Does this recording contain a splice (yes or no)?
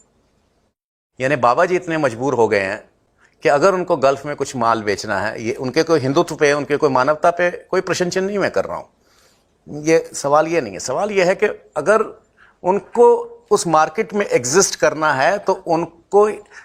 no